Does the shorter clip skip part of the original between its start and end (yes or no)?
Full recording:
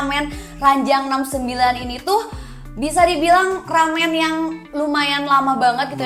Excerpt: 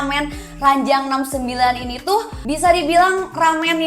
yes